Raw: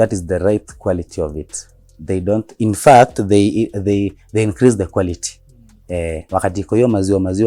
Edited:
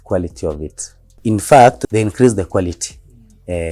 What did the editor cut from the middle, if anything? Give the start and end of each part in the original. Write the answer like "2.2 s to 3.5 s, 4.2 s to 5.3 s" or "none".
1.9 s to 2.5 s, 3.2 s to 4.2 s

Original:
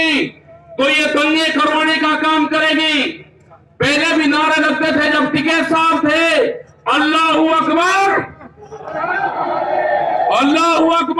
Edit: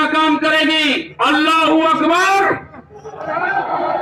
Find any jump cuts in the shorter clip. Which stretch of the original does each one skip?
3.2 s to 6.7 s

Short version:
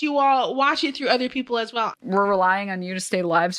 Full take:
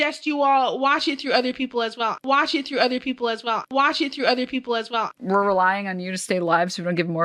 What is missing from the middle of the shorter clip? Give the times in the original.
2.2 s to 5.1 s

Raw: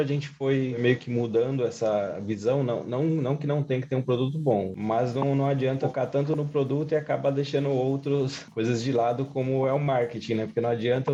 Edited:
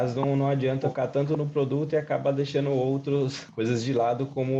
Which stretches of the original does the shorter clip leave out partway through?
none

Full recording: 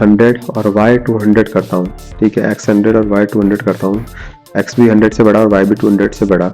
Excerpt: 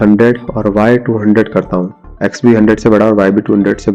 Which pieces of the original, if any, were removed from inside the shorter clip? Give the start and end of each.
2.0 s to 4.3 s

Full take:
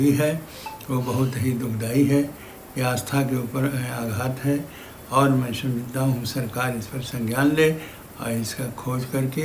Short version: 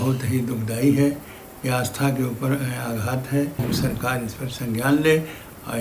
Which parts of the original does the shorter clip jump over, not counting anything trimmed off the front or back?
4.8 s to 6.2 s

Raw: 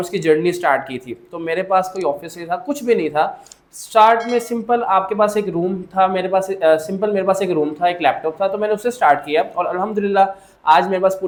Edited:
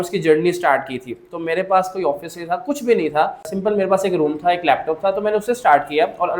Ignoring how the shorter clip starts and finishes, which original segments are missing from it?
3.5 s to 6.9 s

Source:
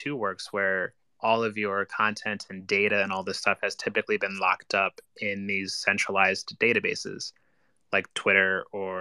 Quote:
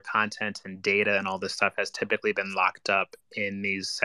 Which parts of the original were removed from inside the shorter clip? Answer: none

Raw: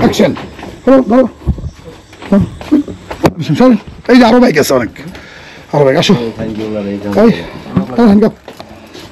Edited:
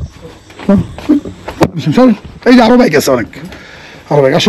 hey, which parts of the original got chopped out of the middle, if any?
none

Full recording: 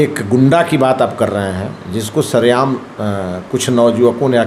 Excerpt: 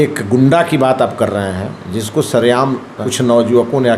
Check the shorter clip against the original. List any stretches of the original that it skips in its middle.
3.0 s to 3.4 s

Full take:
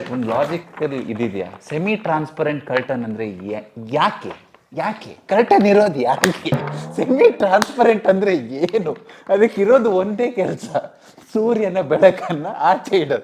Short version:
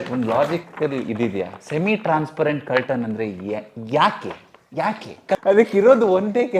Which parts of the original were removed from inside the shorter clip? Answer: 5.3 s to 9.2 s

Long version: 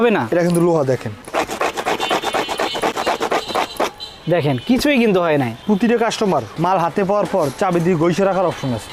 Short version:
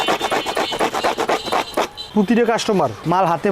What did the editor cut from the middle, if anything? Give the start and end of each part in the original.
4.1 s to 5.6 s

